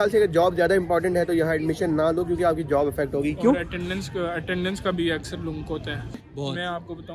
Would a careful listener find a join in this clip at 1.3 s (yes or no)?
no